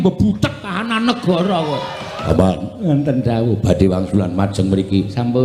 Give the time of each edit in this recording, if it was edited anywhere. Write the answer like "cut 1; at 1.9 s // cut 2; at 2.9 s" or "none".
cut 1; at 2.2 s